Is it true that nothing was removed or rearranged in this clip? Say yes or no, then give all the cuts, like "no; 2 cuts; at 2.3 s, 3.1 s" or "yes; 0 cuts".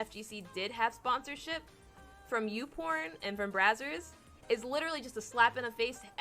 yes; 0 cuts